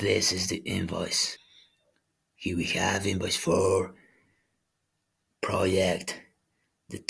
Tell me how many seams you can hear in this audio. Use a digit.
1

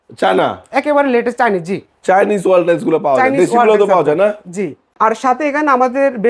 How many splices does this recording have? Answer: 1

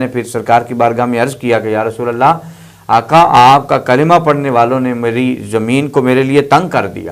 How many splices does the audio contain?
0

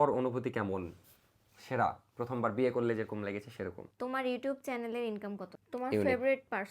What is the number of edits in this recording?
2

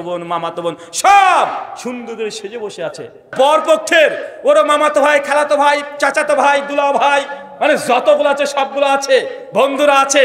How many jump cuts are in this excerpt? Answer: 1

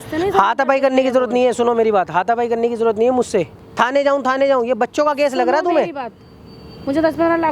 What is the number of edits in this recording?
1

